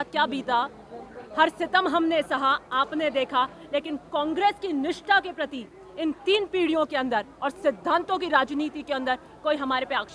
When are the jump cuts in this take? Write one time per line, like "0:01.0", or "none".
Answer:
none